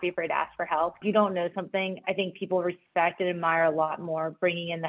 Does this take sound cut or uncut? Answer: cut